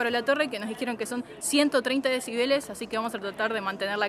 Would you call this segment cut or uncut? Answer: uncut